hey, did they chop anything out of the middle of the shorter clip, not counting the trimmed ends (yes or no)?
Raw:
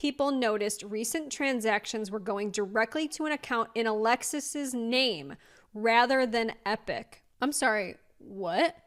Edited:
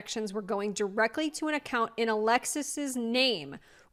no